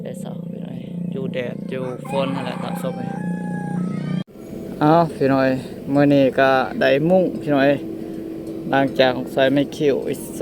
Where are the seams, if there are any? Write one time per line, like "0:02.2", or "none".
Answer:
0:04.3